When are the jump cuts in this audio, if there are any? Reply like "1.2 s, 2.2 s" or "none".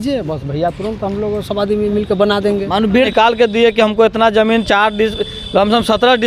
3.1 s